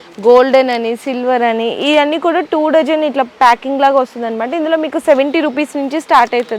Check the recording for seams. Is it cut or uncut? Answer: uncut